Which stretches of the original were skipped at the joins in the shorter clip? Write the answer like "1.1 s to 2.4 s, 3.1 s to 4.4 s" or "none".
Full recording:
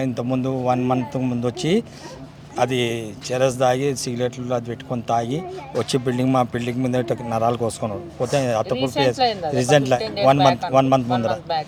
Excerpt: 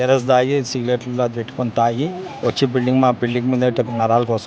none